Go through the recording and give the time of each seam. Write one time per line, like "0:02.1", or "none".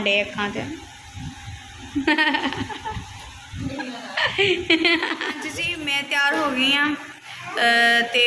0:05.4